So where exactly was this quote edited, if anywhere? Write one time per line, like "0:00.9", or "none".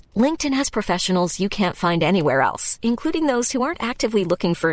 none

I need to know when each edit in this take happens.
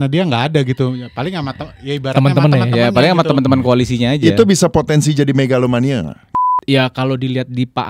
0:06.3

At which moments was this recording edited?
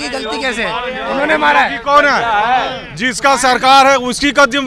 none

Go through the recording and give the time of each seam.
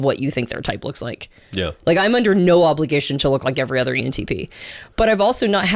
none

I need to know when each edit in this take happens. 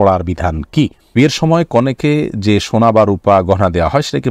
0:01.1

